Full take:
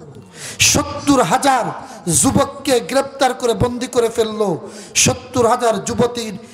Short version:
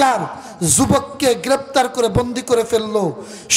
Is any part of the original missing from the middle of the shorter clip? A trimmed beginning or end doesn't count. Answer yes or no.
no